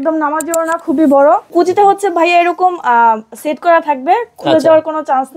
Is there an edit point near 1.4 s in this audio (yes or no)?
yes